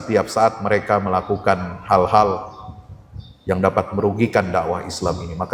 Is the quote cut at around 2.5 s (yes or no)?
no